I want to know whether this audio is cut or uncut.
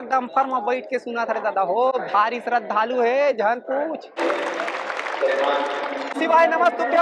uncut